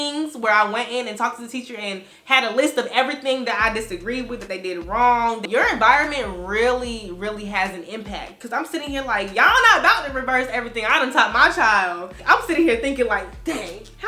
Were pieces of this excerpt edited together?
yes; 2 cuts; at 5.4 s, 12.3 s

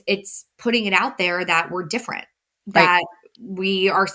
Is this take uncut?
yes; 0 cuts

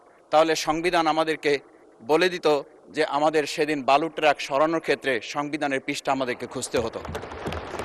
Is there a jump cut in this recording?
no; 0 cuts

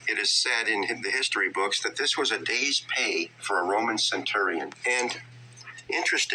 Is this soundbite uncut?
no; 1 cut; at 1.9 s

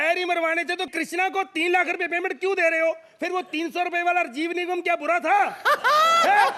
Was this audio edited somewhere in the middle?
no; 0 cuts

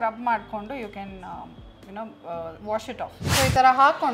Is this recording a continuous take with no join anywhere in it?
no; 1 cut; at 3.2 s

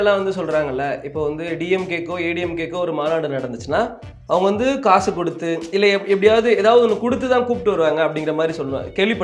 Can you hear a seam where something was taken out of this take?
no; 0 cuts

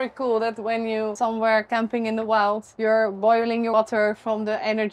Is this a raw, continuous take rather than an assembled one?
no; 3 cuts; at 1.1 s, 2.7 s, 3.7 s

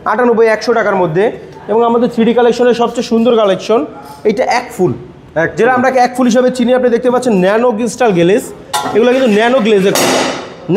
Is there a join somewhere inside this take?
no; 0 cuts

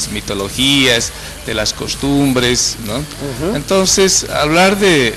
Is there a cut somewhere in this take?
yes; 1 cut; at 1.9 s

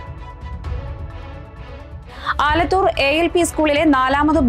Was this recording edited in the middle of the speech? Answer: yes; 1 cut; at 1.2 s

